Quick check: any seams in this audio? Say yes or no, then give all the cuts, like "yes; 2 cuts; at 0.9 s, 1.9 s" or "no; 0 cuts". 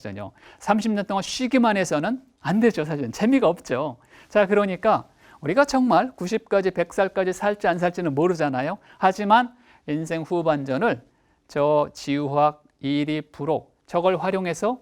yes; 1 cut; at 2.3 s